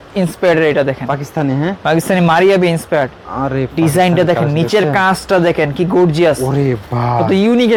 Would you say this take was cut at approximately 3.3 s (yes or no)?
no